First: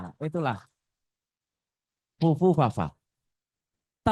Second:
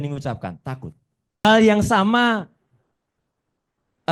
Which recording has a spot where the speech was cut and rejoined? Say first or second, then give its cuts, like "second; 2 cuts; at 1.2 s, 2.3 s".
second; 1 cut; at 1.4 s